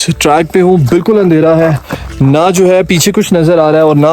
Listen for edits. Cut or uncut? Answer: uncut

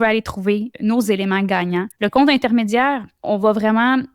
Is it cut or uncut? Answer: cut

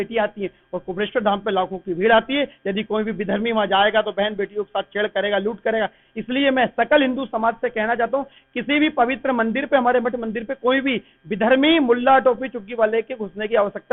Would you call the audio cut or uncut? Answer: uncut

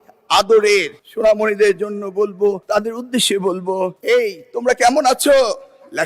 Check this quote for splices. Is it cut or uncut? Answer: cut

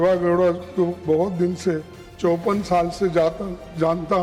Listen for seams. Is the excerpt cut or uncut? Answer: uncut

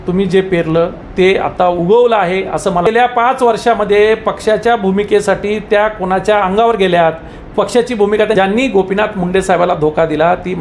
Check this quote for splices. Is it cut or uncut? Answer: cut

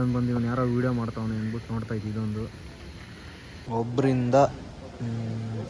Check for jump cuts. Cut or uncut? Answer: cut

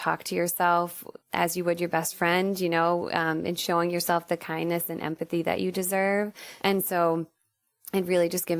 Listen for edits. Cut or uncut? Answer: cut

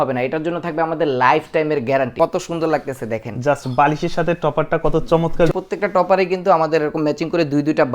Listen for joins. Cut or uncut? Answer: cut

